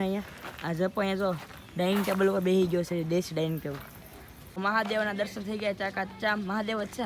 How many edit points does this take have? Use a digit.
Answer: 1